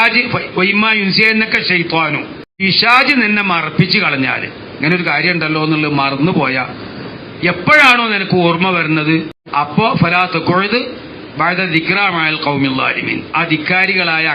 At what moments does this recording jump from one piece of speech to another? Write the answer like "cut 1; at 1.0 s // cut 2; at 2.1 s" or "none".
cut 1; at 2.6 s // cut 2; at 9.7 s